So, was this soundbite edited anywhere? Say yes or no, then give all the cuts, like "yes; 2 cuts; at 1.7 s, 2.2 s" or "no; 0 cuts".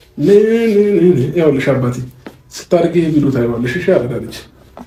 no; 0 cuts